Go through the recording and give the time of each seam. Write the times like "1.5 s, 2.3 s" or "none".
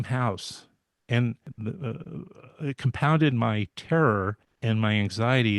1.5 s, 4.5 s